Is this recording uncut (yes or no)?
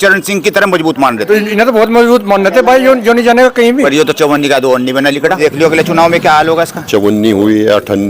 no